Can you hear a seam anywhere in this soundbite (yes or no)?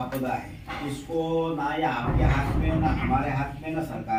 no